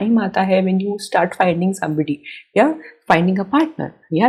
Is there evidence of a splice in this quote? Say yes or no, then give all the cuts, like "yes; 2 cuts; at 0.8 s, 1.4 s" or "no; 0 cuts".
no; 0 cuts